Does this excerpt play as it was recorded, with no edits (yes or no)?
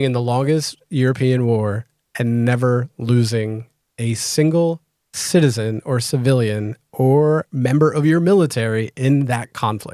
yes